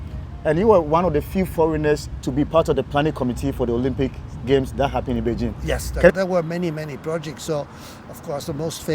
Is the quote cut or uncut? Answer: cut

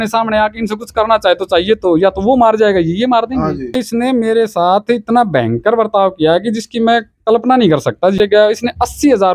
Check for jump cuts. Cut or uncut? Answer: cut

